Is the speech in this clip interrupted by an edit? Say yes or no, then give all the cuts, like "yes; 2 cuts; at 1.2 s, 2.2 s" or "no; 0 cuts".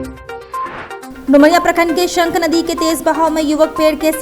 yes; 1 cut; at 1.0 s